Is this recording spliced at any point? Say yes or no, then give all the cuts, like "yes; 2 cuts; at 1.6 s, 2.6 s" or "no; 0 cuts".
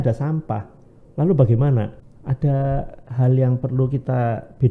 yes; 1 cut; at 2.0 s